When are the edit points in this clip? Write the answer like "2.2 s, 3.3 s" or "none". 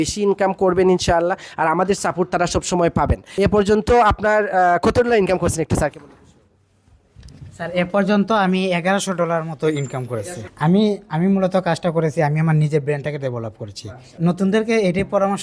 3.4 s, 10.4 s, 14.1 s